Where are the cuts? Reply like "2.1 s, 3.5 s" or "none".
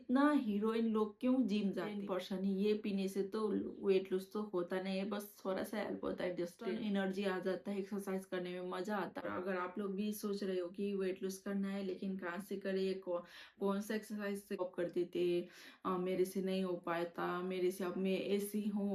2.0 s, 6.6 s, 9.3 s, 14.6 s